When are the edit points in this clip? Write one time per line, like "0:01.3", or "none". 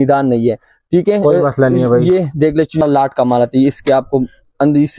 0:02.8

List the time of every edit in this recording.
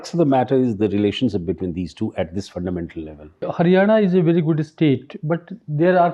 0:03.5

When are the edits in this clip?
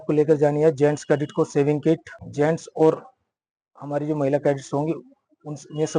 0:02.2

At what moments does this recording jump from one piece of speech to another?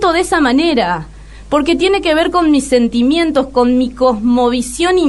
none

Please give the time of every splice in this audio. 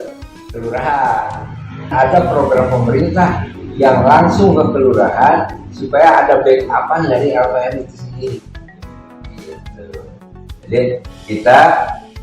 0:01.9

